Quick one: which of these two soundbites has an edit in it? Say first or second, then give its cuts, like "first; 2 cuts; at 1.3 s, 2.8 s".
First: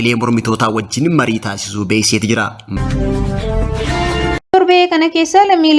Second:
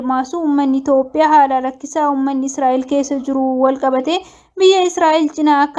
first; 2 cuts; at 2.6 s, 4.5 s